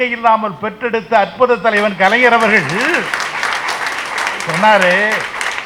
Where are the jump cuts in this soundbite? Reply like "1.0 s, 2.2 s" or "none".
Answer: none